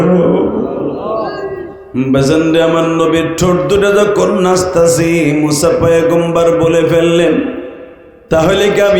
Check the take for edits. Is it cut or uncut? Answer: cut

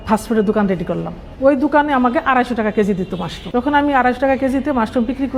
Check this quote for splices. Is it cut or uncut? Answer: uncut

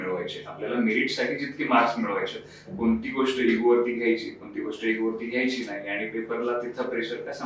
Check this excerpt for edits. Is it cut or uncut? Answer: uncut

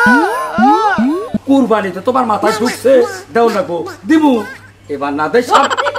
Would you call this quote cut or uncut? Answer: cut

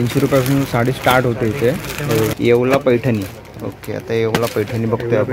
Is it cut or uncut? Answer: cut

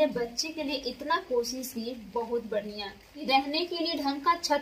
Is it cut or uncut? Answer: cut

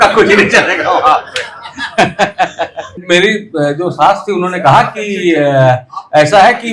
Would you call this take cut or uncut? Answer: cut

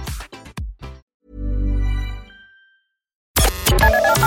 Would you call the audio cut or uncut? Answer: cut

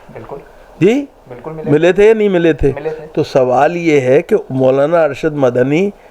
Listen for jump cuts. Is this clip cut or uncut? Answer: uncut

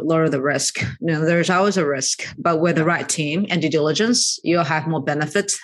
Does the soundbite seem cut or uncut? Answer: uncut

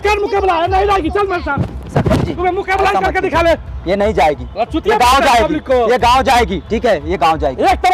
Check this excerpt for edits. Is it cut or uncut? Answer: uncut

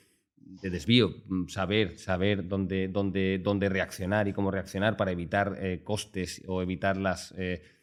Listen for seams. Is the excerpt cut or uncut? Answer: uncut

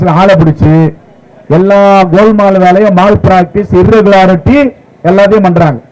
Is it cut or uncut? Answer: uncut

